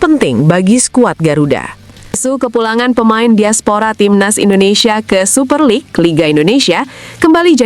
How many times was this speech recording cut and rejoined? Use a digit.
1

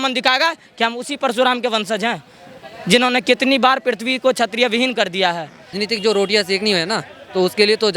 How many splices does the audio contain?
1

